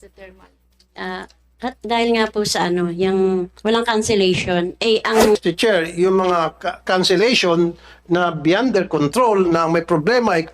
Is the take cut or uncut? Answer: cut